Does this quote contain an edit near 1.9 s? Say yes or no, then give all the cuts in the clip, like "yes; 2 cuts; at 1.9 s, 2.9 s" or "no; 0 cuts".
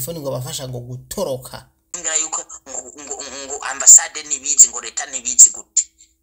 yes; 1 cut; at 1.9 s